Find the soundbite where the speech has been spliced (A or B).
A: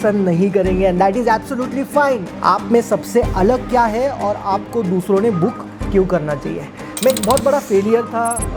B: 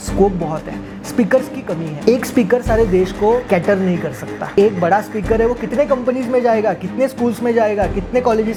A